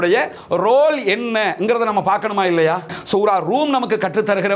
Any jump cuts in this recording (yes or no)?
yes